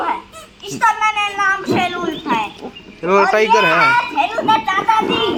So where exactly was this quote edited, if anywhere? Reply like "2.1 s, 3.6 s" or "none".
none